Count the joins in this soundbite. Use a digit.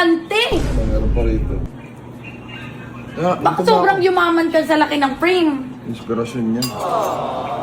1